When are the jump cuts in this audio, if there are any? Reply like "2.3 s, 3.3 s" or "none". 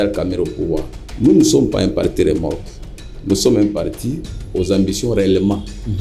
1.0 s